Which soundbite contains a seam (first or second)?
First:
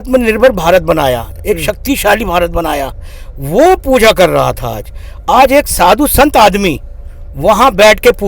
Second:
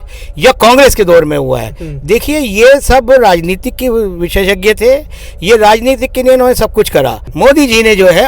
second